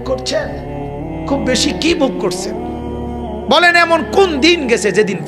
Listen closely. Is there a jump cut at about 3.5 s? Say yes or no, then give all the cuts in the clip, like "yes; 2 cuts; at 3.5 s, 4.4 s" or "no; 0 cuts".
yes; 2 cuts; at 2.2 s, 3.5 s